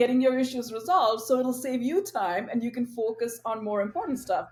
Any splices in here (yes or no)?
no